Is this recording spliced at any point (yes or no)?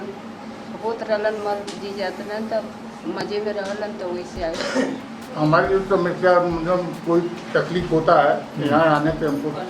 yes